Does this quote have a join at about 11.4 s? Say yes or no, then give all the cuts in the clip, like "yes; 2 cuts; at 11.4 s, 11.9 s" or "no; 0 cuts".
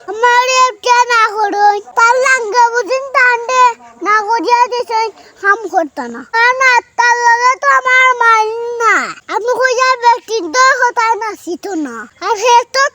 no; 1 cut; at 6.2 s